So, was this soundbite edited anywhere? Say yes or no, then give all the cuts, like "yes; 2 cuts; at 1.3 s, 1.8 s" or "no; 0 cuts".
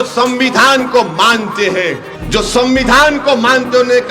yes; 1 cut; at 2.1 s